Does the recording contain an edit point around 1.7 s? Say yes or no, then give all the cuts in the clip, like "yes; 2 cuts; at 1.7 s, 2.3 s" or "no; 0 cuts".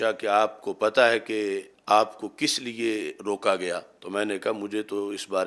yes; 2 cuts; at 1.7 s, 3.9 s